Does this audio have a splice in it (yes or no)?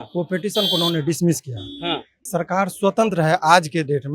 yes